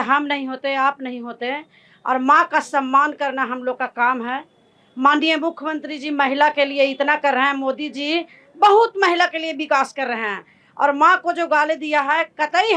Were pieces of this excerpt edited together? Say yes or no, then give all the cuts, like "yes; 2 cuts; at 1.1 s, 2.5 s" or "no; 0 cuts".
no; 0 cuts